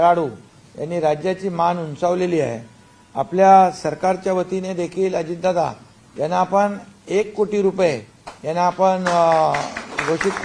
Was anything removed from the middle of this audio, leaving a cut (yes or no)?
no